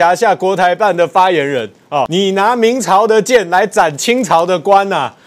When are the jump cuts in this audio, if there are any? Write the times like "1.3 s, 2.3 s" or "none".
2.1 s